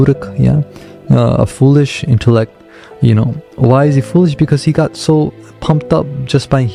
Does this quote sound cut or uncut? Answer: uncut